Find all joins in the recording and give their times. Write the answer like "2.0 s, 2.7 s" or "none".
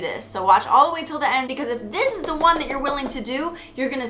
1.5 s